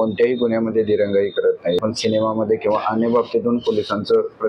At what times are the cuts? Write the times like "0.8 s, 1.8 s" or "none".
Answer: 1.8 s